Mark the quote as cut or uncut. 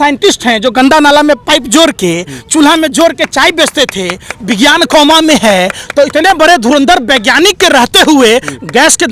uncut